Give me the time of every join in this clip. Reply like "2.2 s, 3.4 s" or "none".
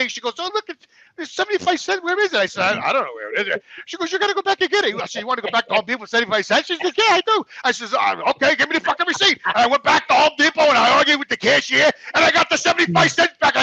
none